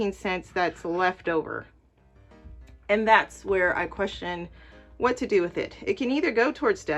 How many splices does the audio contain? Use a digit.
0